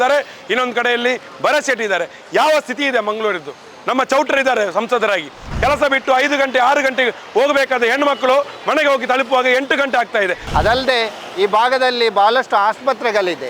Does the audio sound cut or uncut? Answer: cut